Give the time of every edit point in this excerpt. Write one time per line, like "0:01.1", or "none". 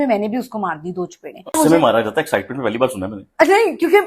0:01.6